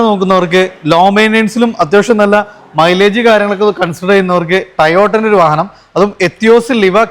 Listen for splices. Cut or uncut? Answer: uncut